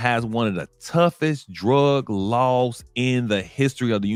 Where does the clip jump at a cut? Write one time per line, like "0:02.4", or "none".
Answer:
none

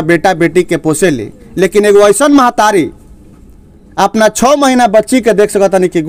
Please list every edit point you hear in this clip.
none

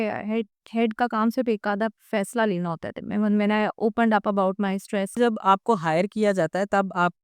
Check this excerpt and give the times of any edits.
0:05.2

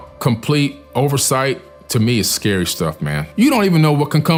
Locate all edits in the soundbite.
none

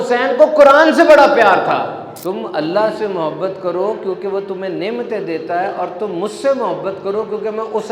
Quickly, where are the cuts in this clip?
0:02.1

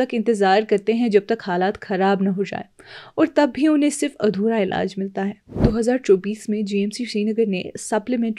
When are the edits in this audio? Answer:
0:05.6

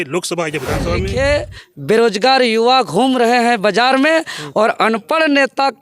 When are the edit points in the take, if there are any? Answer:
0:01.1

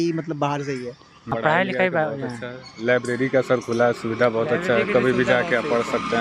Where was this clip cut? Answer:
0:01.3

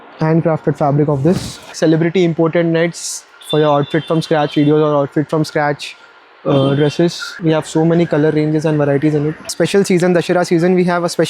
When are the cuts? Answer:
0:01.7
0:07.4
0:09.4

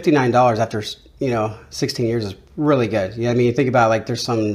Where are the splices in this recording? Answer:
none

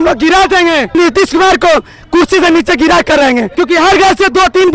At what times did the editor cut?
0:00.9
0:03.5

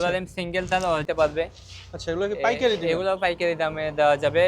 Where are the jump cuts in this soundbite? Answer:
0:01.0

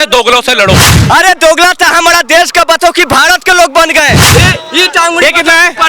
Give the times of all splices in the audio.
0:00.9
0:04.3

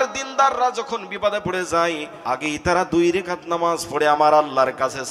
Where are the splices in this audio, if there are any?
0:02.1

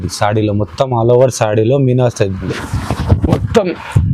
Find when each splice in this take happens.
0:02.5

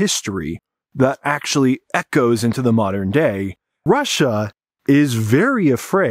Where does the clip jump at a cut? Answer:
0:03.8

